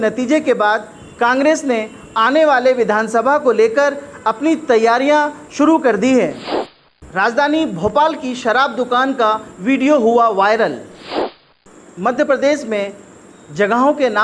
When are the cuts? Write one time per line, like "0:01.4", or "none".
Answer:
0:06.7
0:11.4